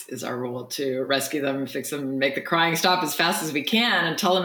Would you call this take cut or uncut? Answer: uncut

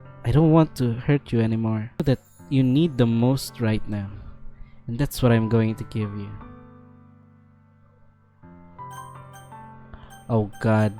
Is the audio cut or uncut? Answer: cut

